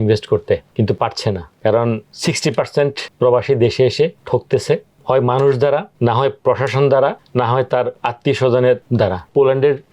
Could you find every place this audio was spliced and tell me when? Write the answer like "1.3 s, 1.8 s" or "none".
1.0 s, 8.0 s, 9.1 s